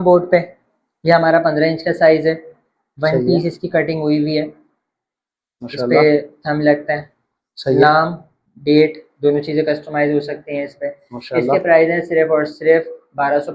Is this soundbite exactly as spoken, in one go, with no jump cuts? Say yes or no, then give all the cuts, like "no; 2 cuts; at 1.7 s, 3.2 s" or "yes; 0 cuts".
yes; 0 cuts